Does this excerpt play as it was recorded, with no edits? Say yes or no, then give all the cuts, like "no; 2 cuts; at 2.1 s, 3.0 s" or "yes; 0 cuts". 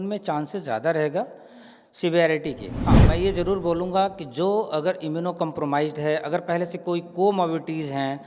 no; 1 cut; at 3.0 s